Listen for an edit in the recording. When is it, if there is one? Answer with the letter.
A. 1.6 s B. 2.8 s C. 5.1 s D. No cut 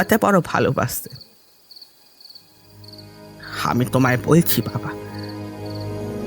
C